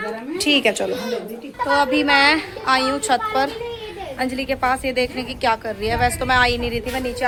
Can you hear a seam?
no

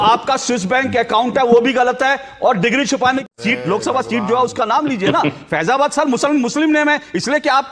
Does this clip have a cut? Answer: yes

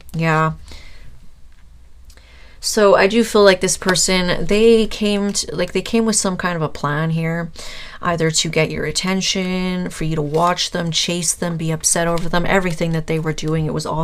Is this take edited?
no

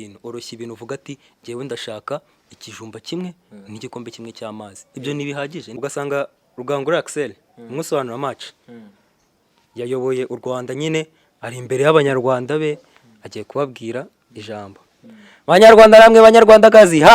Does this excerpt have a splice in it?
yes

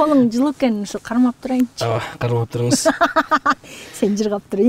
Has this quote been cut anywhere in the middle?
no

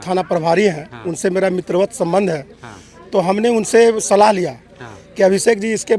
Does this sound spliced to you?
no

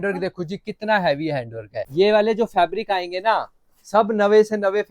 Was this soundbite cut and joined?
yes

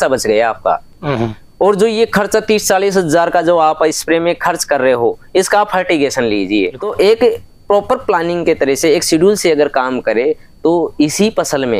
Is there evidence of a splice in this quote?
no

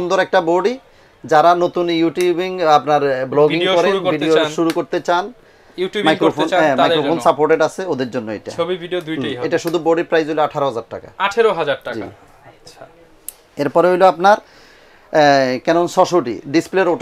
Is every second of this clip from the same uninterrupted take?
yes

